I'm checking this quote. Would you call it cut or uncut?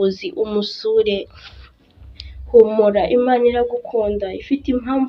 cut